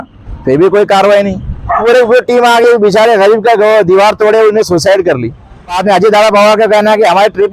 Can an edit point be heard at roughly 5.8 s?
yes; 2 cuts; at 1.8 s, 5.8 s

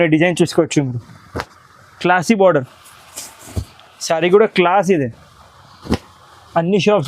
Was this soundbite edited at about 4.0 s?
no; 1 cut; at 1.9 s

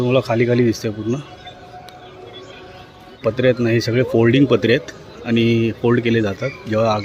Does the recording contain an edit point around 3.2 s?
yes; 1 cut; at 3.2 s

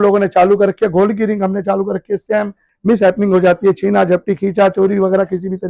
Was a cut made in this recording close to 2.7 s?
yes; 1 cut; at 2.7 s

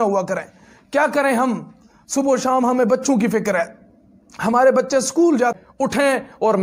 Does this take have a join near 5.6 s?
yes; 1 cut; at 5.6 s

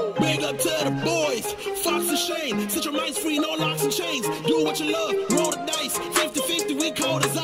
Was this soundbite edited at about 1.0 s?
no; 1 cut; at 2.4 s

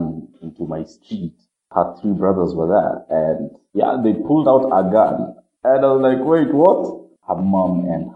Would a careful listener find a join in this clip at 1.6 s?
yes; 2 cuts; at 1.6 s, 7.0 s

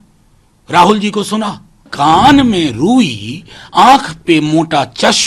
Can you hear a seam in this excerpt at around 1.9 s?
yes; 1 cut; at 1.9 s

